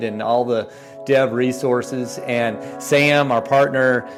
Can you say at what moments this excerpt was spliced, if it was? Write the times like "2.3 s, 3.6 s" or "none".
none